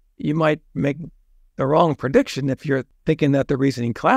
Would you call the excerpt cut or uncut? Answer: cut